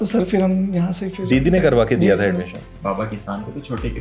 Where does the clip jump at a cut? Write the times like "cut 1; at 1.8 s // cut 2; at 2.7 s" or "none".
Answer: cut 1; at 2.8 s